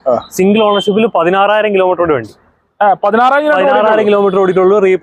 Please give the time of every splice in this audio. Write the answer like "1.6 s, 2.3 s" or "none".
none